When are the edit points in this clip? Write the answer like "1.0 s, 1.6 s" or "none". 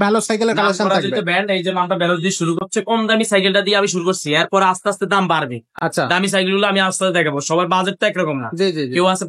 2.6 s